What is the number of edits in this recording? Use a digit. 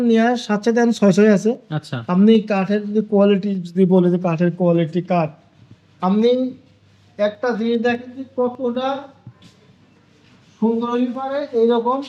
0